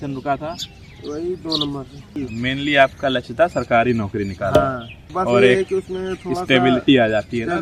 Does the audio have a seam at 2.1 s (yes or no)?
yes